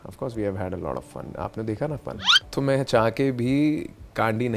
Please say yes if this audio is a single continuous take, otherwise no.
no